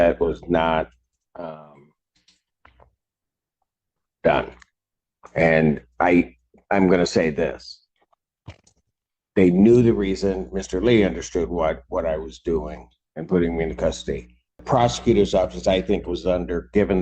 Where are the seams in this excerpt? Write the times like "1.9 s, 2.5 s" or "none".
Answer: 14.6 s